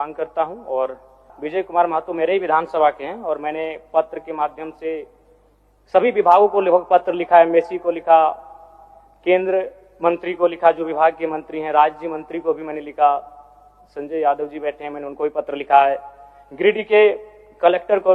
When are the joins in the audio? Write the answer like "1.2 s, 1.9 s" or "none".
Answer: 1.3 s